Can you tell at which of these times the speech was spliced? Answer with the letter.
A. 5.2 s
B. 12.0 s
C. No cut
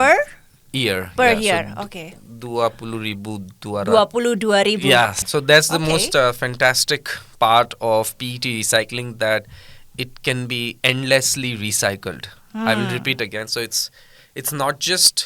A